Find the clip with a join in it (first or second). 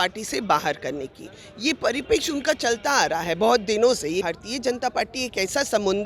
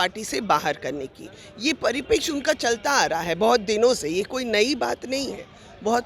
first